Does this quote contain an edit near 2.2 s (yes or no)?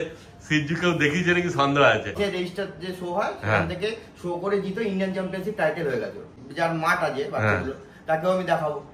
yes